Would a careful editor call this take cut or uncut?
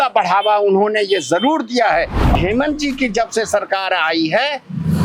cut